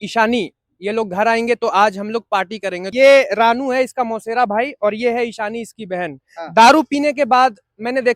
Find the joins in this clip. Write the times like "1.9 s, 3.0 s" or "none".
2.8 s